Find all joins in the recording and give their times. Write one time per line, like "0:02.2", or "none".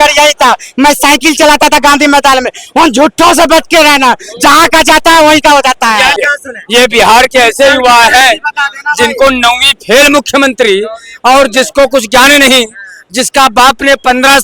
0:06.2

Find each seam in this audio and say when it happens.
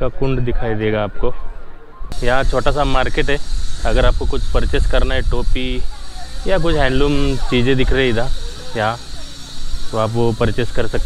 0:02.0

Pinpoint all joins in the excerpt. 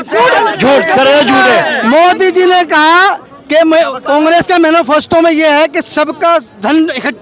0:01.7

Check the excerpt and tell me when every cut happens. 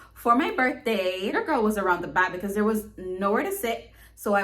0:01.3

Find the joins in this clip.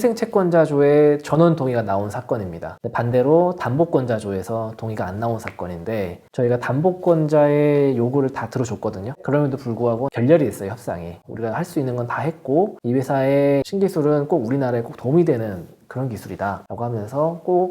0:09.2
0:11.2
0:13.7

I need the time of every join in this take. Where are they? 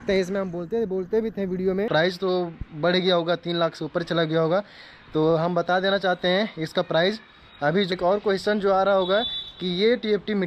0:01.9
0:07.9

